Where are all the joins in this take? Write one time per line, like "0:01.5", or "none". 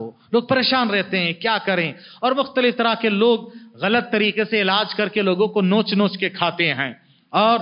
none